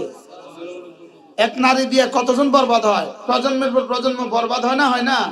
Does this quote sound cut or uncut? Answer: cut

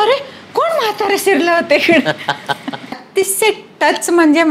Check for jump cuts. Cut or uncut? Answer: cut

